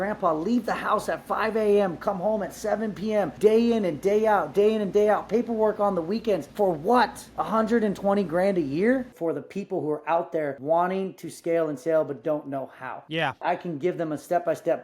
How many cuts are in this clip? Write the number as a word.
six